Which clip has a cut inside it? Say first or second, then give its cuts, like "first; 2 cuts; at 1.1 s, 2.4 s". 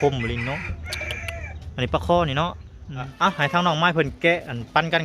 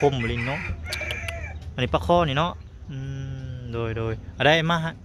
first; 1 cut; at 3.1 s